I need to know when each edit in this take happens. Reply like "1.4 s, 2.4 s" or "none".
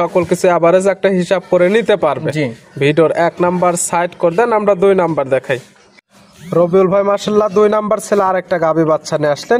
none